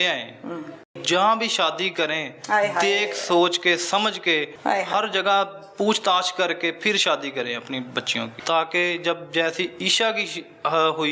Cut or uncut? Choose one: cut